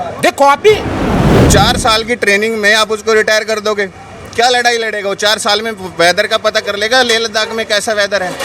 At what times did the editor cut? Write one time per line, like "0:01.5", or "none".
0:01.4